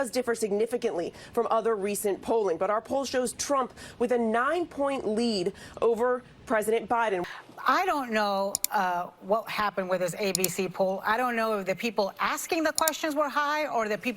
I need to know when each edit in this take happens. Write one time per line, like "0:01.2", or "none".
0:01.5
0:07.2